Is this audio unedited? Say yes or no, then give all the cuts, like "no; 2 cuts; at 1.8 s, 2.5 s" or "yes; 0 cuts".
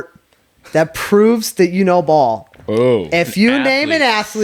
yes; 0 cuts